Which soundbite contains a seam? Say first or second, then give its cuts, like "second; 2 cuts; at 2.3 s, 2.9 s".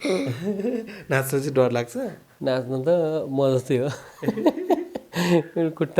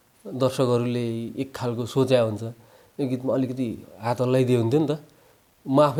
first; 1 cut; at 2.2 s